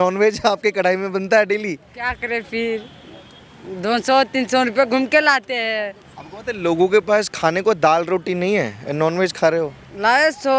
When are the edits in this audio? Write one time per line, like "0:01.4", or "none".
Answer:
none